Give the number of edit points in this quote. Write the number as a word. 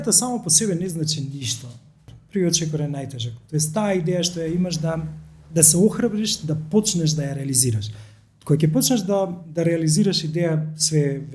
one